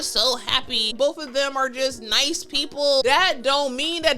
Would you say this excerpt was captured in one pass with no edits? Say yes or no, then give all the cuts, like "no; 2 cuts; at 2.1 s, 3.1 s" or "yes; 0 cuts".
no; 2 cuts; at 0.9 s, 3.0 s